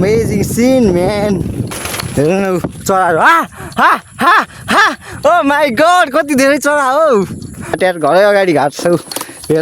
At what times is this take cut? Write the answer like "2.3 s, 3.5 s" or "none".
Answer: 1.7 s, 7.8 s